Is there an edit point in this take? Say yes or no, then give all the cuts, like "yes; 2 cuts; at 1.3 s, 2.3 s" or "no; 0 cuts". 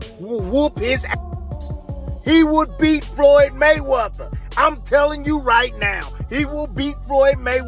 no; 0 cuts